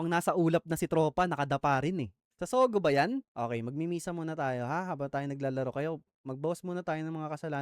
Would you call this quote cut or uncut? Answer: cut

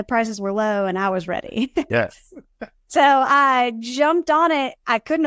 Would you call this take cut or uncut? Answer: cut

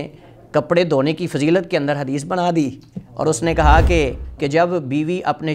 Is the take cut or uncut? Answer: cut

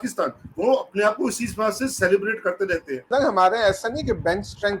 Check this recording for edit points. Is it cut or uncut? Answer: cut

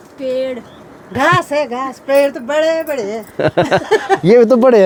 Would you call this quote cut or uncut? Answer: uncut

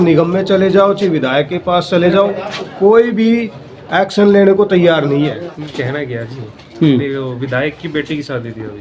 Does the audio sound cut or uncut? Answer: cut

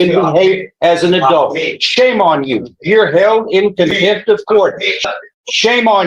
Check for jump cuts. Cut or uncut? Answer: cut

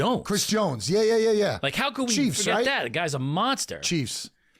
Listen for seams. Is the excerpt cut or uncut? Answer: uncut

